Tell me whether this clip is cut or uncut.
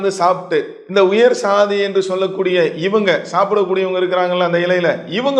uncut